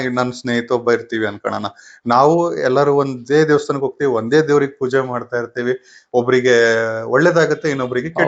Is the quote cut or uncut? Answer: uncut